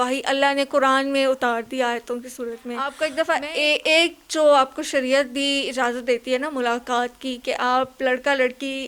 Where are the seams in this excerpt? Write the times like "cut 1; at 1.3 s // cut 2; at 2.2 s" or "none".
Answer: cut 1; at 2.9 s